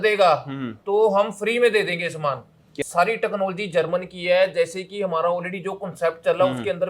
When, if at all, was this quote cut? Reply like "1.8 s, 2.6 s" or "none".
2.7 s